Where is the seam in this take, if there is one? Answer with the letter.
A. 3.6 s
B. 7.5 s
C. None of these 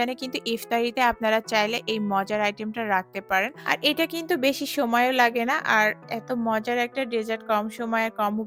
A